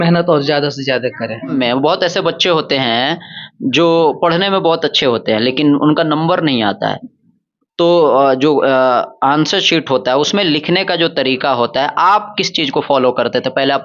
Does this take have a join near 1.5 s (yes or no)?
yes